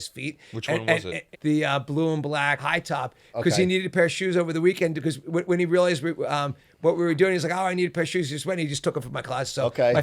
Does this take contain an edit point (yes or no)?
yes